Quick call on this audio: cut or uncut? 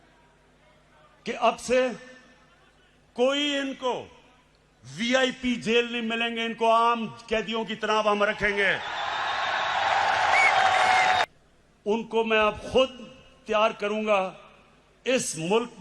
cut